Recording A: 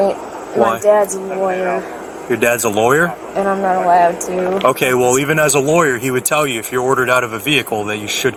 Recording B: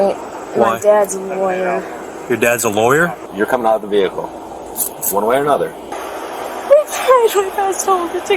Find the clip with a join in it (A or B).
B